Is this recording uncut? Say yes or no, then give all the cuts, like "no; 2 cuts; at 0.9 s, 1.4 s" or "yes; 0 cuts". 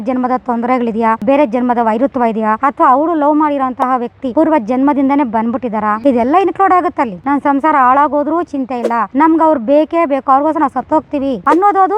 no; 1 cut; at 7.2 s